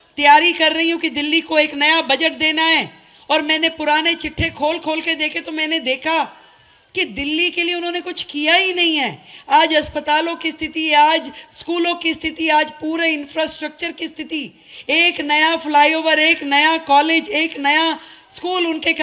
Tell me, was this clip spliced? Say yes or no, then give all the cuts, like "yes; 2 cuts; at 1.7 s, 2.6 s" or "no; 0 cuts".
no; 0 cuts